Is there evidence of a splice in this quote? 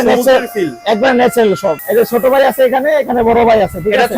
yes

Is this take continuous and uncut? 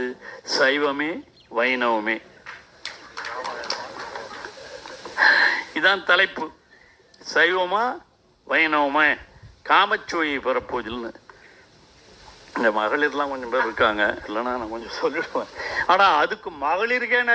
yes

